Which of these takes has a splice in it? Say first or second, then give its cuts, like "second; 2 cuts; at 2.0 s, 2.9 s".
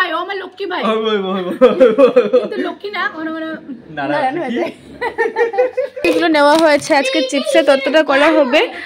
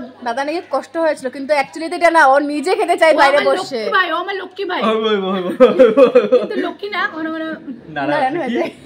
first; 1 cut; at 6.0 s